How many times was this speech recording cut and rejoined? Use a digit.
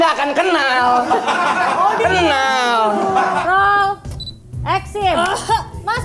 1